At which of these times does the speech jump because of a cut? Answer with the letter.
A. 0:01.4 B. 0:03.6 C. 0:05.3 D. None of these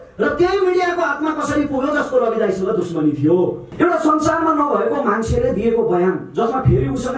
B